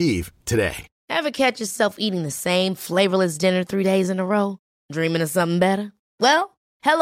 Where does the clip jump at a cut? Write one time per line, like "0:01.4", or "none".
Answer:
0:00.9